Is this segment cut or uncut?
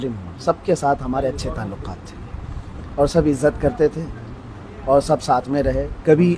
uncut